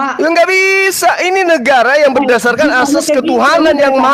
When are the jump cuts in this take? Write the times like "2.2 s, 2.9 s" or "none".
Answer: none